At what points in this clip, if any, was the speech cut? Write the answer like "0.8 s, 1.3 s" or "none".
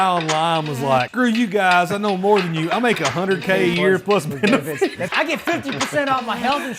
1.1 s, 5.0 s